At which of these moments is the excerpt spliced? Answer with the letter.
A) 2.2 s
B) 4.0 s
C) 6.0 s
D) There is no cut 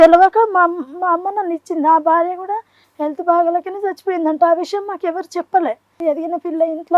C